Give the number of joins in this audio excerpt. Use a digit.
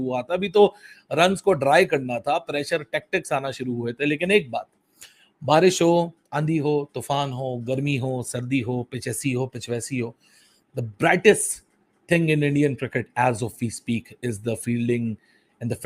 0